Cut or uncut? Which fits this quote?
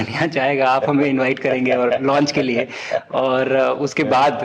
uncut